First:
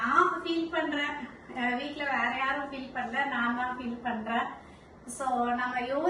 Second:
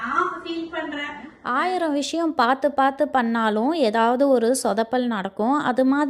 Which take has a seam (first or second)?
second